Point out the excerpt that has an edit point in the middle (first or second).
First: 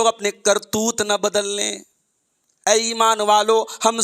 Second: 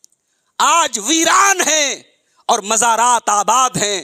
first